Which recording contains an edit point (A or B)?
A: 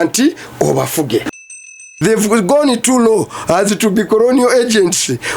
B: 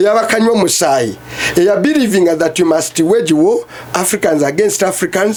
A